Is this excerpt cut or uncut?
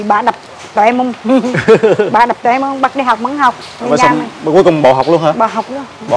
uncut